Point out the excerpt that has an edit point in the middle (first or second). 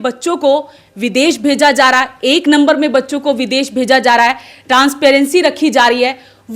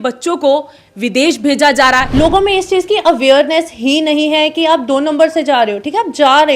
second